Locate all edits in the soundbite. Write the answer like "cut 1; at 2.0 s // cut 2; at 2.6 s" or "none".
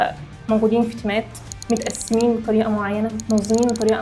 none